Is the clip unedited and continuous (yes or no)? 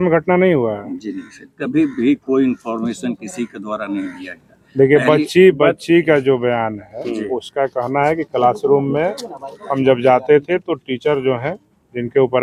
yes